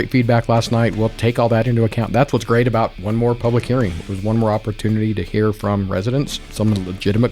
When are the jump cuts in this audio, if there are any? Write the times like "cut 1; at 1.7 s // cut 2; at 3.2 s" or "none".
cut 1; at 3.0 s // cut 2; at 6.4 s